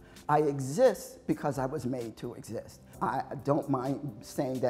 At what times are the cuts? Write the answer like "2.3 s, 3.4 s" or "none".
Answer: 2.8 s